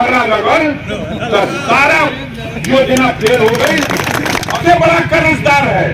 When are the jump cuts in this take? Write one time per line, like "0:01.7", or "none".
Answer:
0:04.6